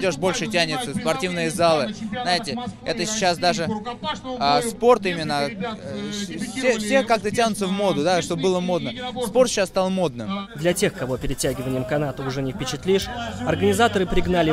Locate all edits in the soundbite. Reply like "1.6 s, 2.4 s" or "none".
none